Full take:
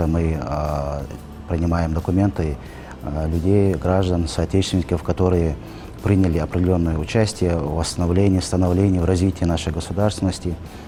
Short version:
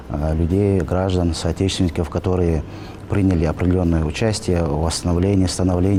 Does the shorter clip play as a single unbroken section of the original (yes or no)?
yes